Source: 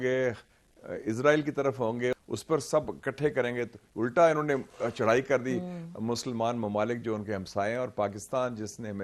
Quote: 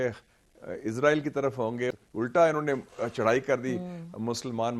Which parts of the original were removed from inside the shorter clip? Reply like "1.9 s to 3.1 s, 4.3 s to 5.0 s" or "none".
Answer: 2.2 s to 3.8 s